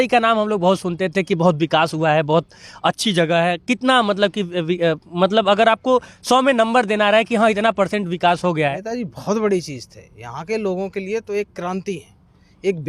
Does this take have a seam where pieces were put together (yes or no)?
yes